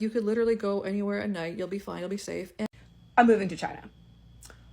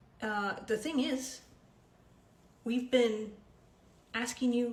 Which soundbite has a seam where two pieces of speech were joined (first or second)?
first